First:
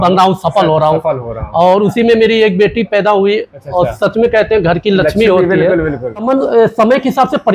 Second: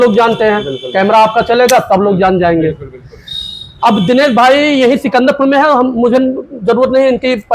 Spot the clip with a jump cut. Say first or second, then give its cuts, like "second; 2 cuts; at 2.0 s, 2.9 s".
first; 1 cut; at 6.3 s